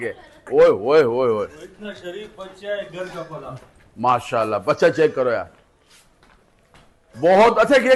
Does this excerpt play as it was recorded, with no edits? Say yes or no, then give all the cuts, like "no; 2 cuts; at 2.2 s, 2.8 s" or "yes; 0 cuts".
yes; 0 cuts